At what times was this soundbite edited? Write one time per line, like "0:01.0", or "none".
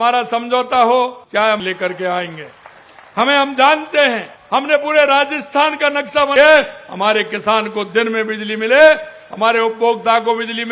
0:01.6
0:06.3